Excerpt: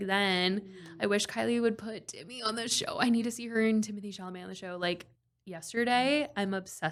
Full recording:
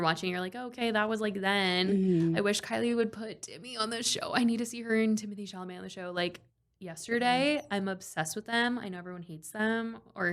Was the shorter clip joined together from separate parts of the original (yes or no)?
no